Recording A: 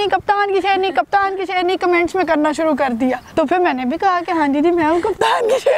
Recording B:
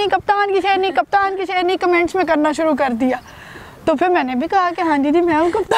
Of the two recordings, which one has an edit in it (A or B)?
A